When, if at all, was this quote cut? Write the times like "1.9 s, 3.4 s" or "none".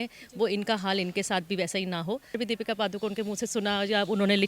2.4 s